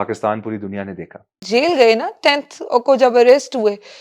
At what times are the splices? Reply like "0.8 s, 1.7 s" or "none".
1.4 s